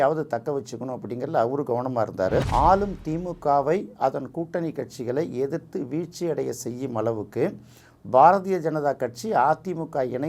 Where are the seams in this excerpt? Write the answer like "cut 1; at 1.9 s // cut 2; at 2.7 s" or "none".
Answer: cut 1; at 2.5 s